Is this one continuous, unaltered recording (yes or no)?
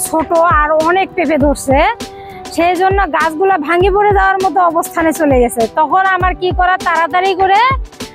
yes